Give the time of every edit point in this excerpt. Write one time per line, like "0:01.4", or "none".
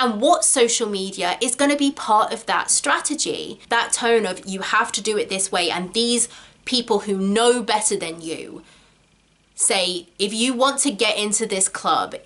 0:03.5

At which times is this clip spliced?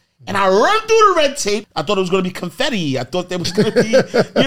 0:01.6

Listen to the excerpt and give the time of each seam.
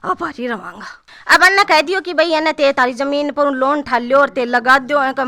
0:01.0

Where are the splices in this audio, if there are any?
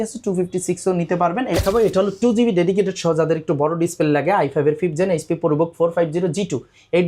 0:01.6

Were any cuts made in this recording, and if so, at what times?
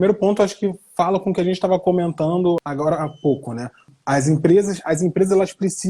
0:02.6
0:03.9

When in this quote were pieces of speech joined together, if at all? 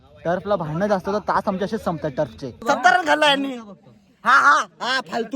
0:02.5

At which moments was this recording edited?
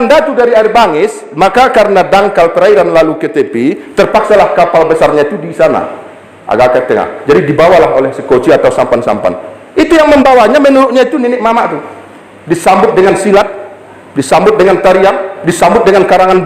none

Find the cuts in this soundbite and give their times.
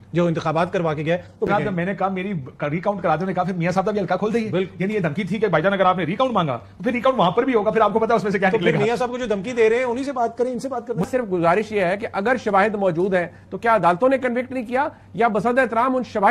0:01.5
0:11.0

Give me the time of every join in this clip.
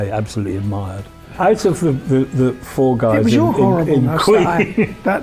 0:01.3

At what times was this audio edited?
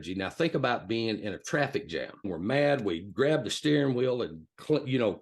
0:02.2

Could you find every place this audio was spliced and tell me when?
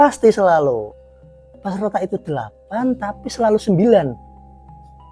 0:04.2

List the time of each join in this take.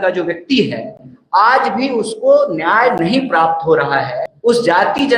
0:04.2

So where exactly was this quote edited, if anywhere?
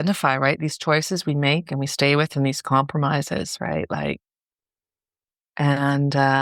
none

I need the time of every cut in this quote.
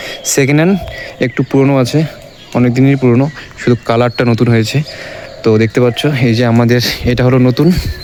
none

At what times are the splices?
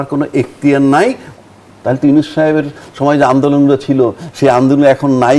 0:01.3

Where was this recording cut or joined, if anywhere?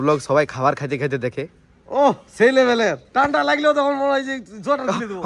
0:03.0

